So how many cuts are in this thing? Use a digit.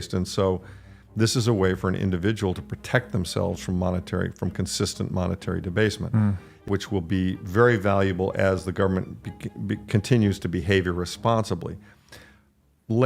1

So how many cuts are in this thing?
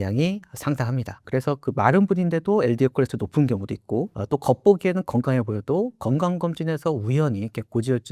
2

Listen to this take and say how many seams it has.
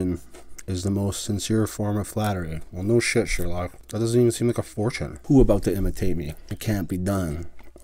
3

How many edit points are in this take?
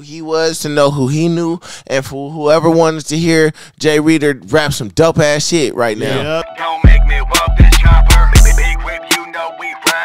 1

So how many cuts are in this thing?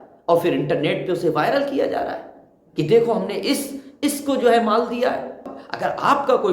1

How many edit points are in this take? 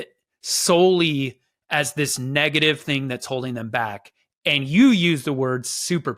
0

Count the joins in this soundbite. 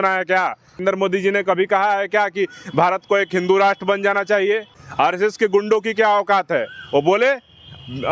2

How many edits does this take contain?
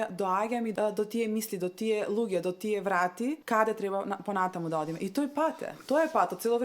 3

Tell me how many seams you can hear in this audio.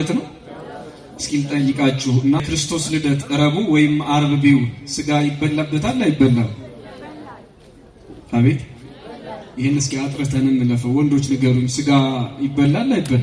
1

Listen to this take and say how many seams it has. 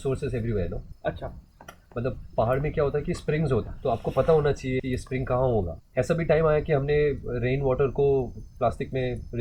4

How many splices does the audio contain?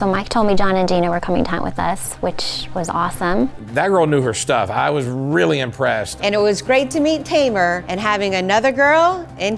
3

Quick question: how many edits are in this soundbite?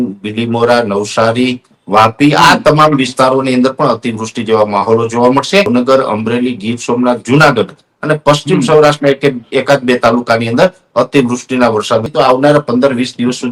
2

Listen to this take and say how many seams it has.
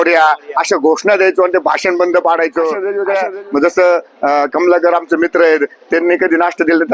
1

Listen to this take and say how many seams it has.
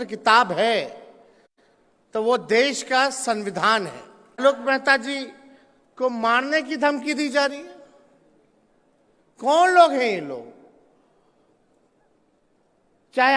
1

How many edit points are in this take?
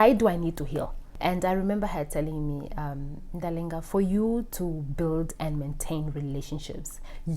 1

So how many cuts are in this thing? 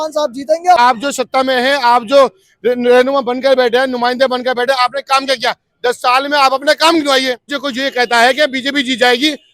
2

